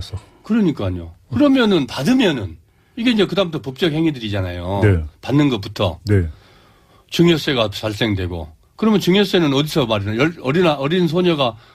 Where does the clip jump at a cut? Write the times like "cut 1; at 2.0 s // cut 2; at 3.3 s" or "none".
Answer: none